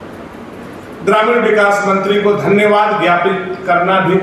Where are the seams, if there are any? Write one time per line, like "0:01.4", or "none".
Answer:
none